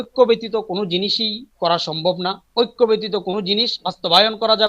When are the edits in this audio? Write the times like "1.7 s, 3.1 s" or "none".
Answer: 2.4 s